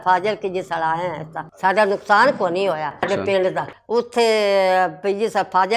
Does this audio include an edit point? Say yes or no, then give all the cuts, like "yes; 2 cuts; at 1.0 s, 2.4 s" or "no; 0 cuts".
no; 0 cuts